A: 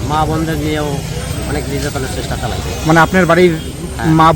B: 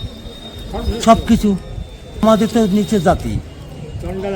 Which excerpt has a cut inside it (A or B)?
B